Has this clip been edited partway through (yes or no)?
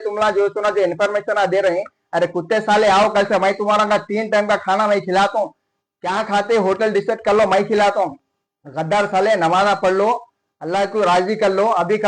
no